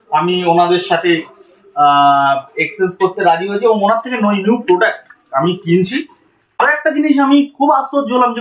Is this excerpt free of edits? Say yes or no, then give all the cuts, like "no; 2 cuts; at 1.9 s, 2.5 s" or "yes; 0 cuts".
no; 1 cut; at 6.6 s